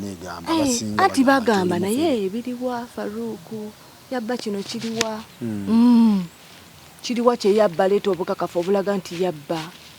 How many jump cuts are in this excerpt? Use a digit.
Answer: 1